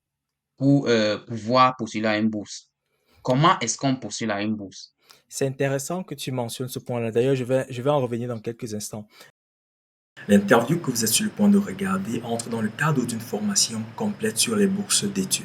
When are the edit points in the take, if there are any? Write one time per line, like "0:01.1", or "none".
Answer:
0:09.4